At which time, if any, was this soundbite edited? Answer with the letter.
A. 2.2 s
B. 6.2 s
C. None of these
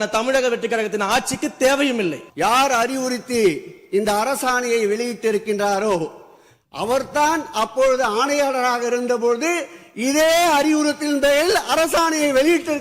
A